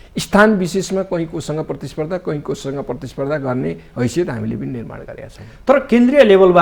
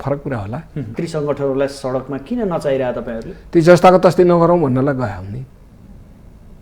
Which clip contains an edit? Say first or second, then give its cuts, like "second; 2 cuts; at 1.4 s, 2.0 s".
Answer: second; 1 cut; at 0.9 s